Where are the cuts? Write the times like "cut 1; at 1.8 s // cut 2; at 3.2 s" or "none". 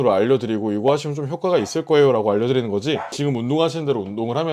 cut 1; at 3.1 s

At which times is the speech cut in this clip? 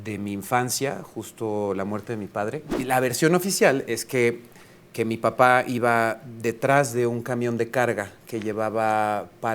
cut 1; at 2.7 s

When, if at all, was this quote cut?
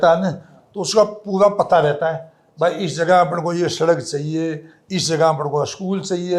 none

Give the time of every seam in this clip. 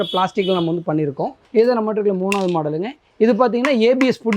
cut 1; at 1.4 s

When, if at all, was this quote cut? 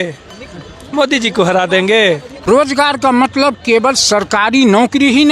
cut 1; at 2.5 s

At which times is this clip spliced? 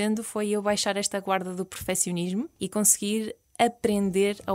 cut 1; at 2.5 s

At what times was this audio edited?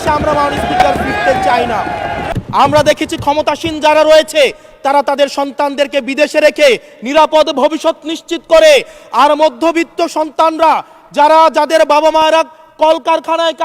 cut 1; at 2.2 s

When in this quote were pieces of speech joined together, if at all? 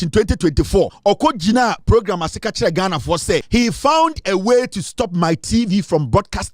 cut 1; at 0.9 s // cut 2; at 3.4 s

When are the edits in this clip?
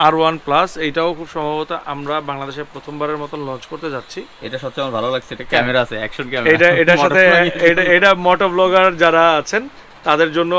none

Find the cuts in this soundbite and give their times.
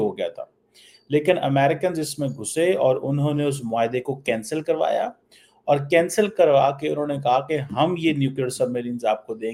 none

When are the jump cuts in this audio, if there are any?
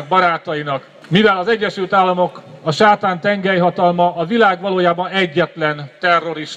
cut 1; at 0.9 s

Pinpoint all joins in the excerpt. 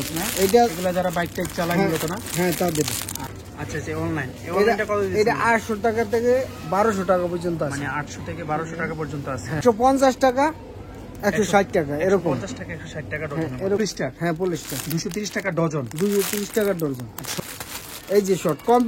cut 1; at 3.5 s // cut 2; at 9.6 s // cut 3; at 13.8 s // cut 4; at 17.4 s

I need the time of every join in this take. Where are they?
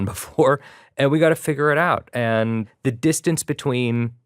cut 1; at 2.7 s

